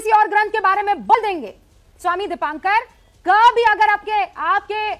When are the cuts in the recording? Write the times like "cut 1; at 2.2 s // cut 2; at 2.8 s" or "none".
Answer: cut 1; at 1.1 s